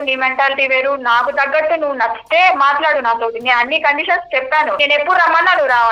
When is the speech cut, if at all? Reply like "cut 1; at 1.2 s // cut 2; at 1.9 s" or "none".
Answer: cut 1; at 4.8 s